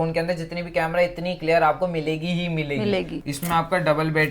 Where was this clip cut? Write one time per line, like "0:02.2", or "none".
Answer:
0:03.2